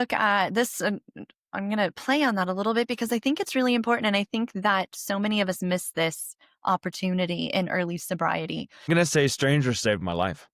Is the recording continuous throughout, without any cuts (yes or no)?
no